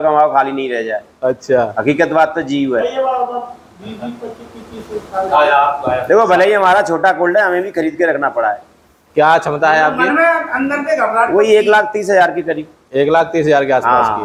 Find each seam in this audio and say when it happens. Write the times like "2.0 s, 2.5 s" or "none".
none